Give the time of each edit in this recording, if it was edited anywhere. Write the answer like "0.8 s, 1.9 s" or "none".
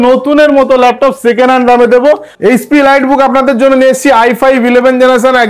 2.3 s